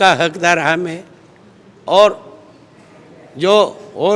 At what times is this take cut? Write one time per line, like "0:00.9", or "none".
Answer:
none

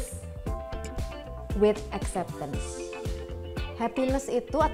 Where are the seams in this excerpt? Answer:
none

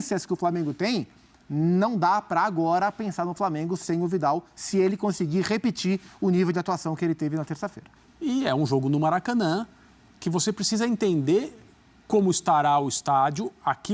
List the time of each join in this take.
0:07.9

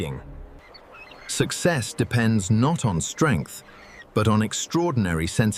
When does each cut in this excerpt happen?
none

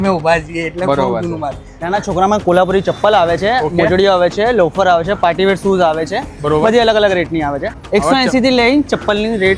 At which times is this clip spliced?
0:01.8
0:07.7

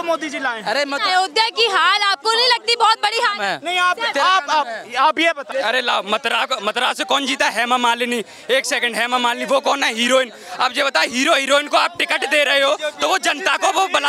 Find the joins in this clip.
0:05.4

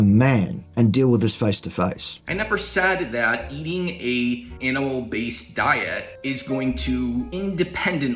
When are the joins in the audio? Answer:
0:02.1
0:04.5
0:06.1
0:07.3

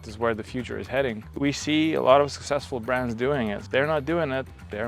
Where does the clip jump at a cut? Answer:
0:01.4
0:03.6

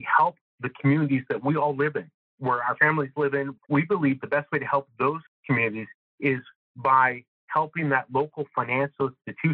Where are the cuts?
0:03.5

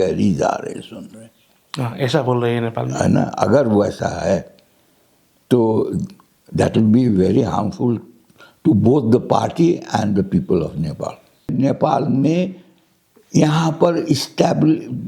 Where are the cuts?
0:11.5

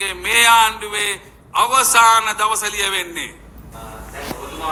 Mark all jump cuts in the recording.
none

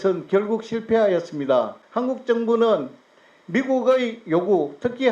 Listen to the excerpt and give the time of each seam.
0:01.8

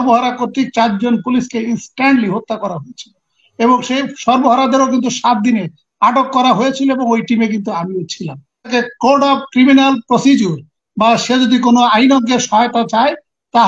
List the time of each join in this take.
0:08.7

